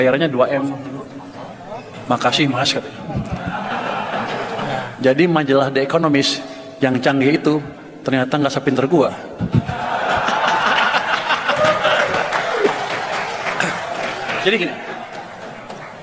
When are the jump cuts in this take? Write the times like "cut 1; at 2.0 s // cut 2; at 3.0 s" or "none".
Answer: cut 1; at 4.9 s